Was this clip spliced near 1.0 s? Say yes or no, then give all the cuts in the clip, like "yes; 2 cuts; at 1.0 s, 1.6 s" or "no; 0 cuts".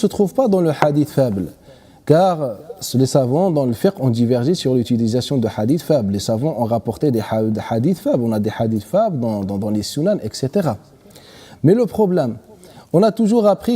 yes; 1 cut; at 1.0 s